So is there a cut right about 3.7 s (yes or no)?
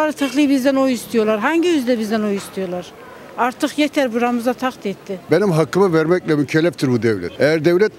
no